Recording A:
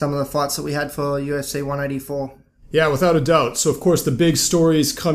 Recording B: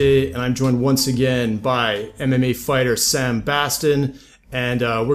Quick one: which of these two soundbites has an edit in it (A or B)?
A